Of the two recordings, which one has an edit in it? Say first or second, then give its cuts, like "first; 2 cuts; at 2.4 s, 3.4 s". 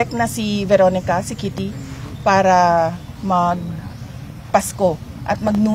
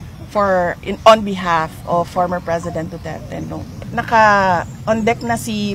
second; 1 cut; at 3.9 s